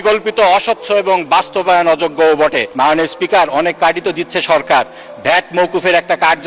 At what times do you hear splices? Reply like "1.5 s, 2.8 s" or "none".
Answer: 2.6 s